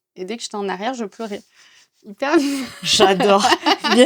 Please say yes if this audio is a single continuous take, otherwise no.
yes